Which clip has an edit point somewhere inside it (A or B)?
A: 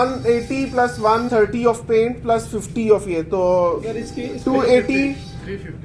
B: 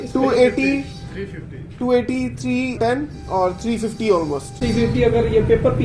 A